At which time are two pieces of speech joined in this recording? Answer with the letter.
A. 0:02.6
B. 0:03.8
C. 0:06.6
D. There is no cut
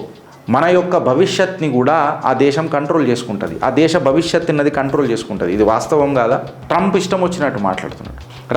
C